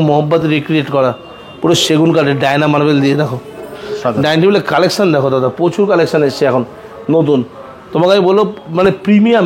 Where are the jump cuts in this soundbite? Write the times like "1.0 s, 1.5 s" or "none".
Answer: none